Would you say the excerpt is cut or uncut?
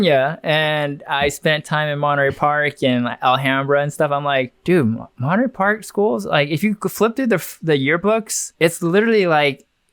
cut